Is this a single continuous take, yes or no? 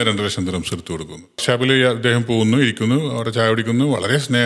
no